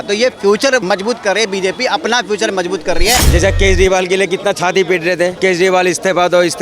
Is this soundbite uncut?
no; 2 cuts; at 0.8 s, 3.2 s

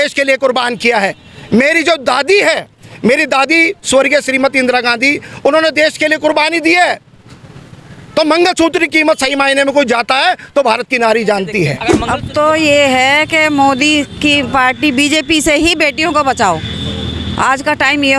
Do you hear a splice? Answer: yes; 1 cut; at 11.9 s

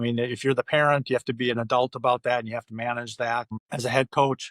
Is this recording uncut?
no; 1 cut; at 3.6 s

